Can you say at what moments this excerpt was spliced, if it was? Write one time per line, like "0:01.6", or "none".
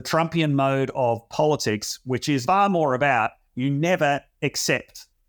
0:02.4

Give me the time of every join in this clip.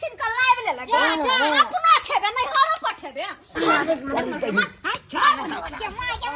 0:03.6

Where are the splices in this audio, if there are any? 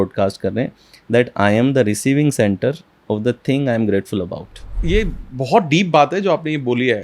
0:04.8

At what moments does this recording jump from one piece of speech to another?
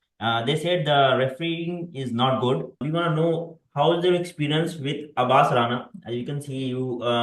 0:02.8

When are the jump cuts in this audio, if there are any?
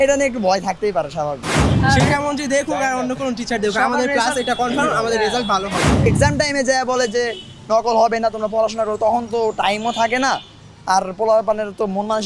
0:01.7
0:06.0

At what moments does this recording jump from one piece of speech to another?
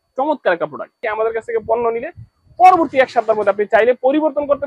0:01.0

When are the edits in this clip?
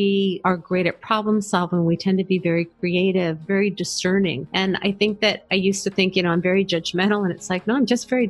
0:03.4

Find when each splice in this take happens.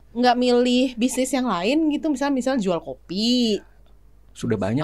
none

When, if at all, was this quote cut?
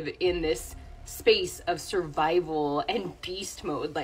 none

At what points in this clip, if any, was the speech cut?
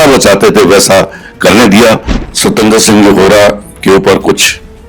0:02.1

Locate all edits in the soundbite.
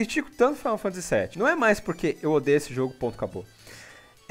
0:01.3

